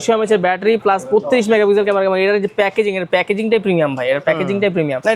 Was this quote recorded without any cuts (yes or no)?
yes